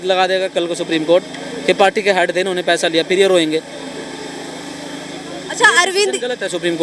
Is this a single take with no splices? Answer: yes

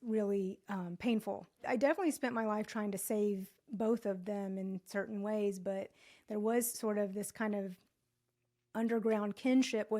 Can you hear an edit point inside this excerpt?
yes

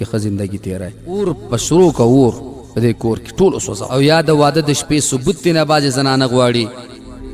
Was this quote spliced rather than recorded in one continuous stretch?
yes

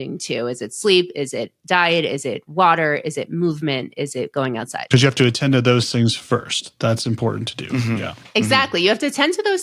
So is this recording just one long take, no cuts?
yes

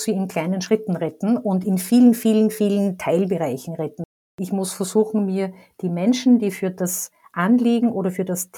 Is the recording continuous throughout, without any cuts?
no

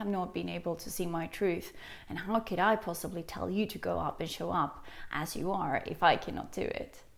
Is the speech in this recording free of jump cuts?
yes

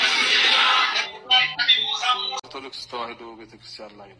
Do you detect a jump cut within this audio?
yes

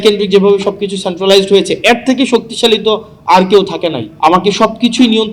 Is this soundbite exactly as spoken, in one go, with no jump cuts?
no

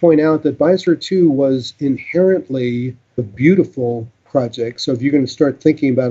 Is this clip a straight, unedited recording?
no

